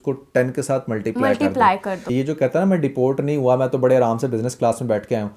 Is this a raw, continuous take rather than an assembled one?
no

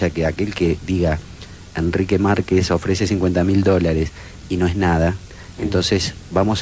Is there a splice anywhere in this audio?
yes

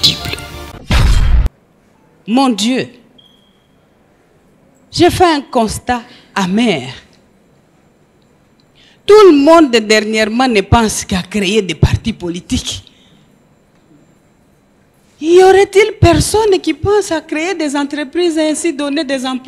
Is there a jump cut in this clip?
no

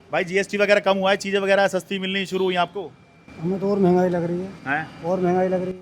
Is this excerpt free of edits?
yes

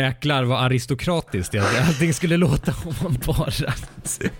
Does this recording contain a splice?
no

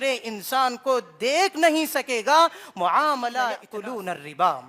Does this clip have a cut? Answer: yes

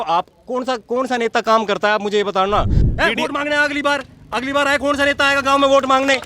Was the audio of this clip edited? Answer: yes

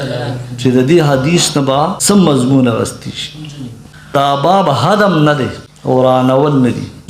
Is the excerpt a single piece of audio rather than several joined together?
no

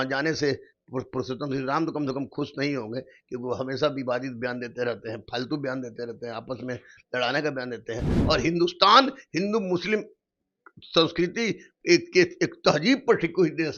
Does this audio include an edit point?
yes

